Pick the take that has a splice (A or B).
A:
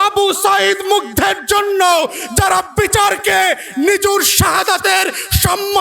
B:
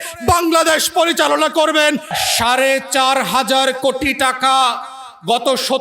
B